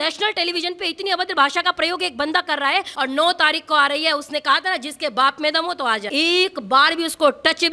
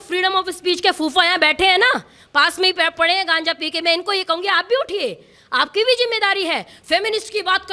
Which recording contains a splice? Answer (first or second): first